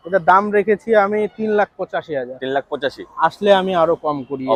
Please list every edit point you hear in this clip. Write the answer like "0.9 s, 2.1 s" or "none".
none